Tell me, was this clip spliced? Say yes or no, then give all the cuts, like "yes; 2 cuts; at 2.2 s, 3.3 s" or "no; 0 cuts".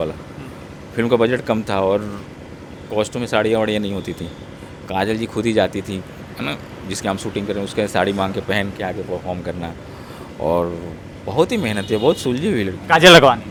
no; 0 cuts